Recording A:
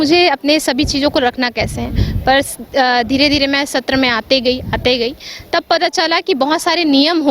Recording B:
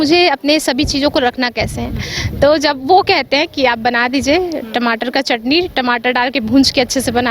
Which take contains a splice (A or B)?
B